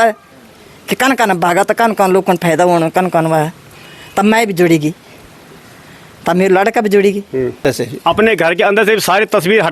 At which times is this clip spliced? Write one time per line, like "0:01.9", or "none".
0:07.6